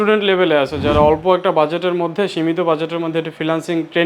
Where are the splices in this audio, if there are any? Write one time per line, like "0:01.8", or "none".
none